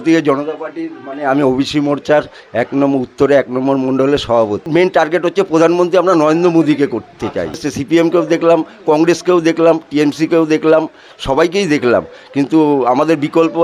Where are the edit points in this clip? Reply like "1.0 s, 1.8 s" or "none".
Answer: 4.6 s, 7.6 s